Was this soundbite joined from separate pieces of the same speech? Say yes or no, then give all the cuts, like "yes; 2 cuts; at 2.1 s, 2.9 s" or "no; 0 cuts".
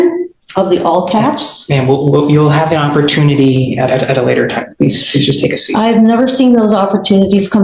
no; 0 cuts